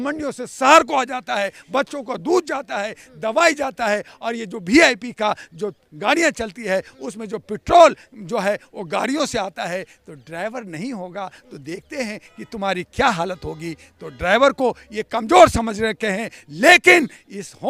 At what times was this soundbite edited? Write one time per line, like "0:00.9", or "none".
none